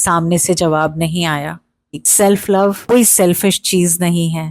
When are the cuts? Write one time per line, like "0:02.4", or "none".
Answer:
0:02.1